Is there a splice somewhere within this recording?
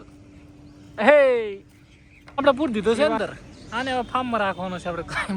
yes; 1 cut; at 2.4 s

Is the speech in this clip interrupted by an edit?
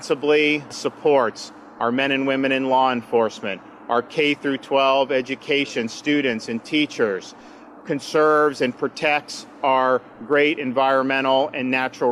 yes; 1 cut; at 7.8 s

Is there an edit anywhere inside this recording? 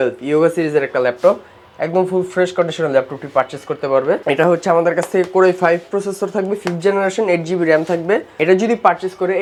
no; 0 cuts

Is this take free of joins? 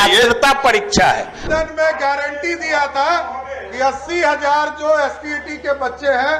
no; 1 cut; at 1.4 s

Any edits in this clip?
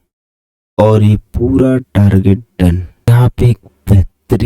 yes; 1 cut; at 3.1 s

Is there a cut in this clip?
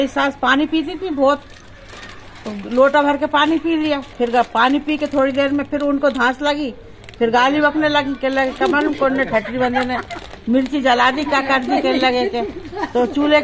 no; 0 cuts

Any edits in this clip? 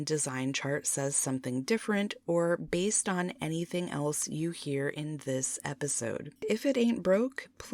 yes; 1 cut; at 6.4 s

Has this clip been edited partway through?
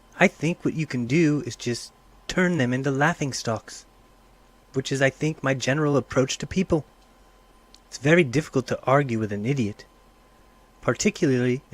yes; 1 cut; at 4.2 s

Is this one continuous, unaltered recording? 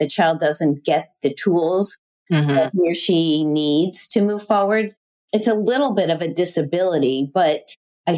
yes; 0 cuts

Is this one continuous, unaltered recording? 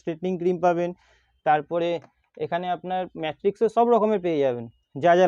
yes; 0 cuts

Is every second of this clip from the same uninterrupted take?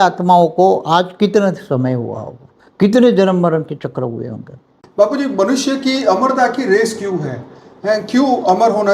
no; 1 cut; at 4.8 s

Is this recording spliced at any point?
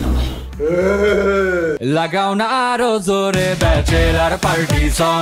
yes; 1 cut; at 1.9 s

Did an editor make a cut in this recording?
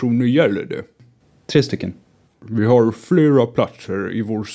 yes; 2 cuts; at 1.0 s, 2.2 s

